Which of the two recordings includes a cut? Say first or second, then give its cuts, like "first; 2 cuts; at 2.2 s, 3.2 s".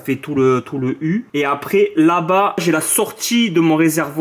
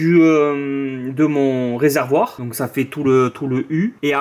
first; 1 cut; at 2.6 s